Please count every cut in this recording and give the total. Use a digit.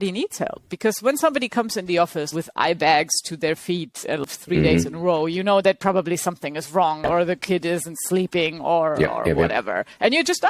3